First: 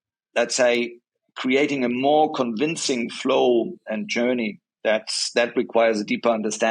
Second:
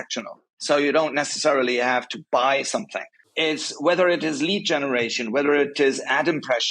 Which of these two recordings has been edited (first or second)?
second